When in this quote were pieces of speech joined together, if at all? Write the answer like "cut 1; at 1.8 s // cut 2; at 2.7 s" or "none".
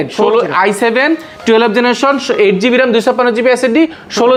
none